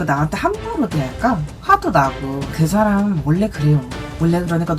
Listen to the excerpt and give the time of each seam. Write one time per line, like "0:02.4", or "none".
0:02.4